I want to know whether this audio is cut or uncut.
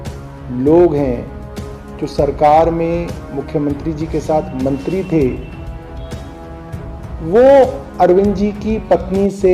cut